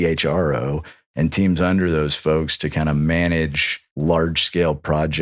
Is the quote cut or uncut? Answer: cut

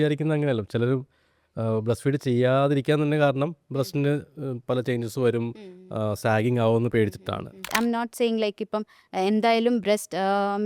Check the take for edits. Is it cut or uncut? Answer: cut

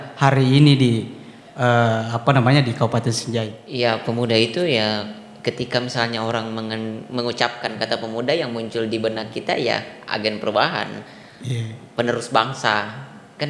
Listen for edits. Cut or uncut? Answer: cut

